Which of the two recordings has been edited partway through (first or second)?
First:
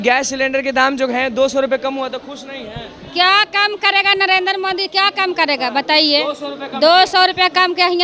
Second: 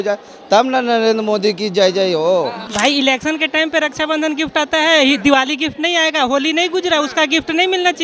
second